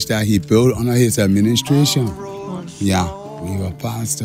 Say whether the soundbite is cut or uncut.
cut